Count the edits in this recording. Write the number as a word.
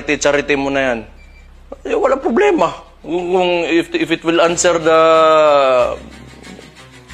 zero